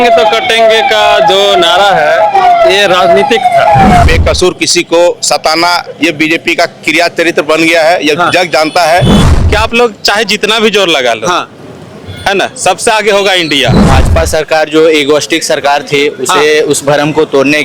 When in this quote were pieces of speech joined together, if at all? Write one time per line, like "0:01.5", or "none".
0:04.0
0:09.2
0:13.9